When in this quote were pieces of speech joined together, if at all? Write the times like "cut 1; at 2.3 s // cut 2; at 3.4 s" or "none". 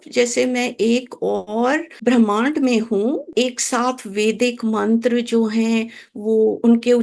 cut 1; at 1.9 s // cut 2; at 3.3 s